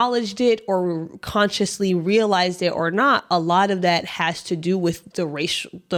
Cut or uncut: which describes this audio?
uncut